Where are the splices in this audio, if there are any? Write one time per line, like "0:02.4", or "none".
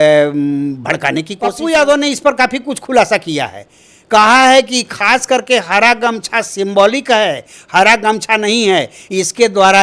0:01.6